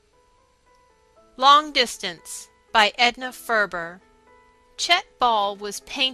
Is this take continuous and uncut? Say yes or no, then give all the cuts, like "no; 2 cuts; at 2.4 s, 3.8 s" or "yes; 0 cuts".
no; 1 cut; at 2.2 s